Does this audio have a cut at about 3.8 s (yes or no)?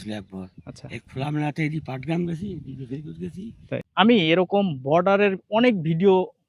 yes